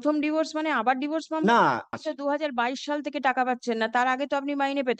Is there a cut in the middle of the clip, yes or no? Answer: yes